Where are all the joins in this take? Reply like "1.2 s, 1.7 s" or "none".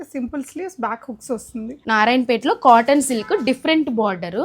1.8 s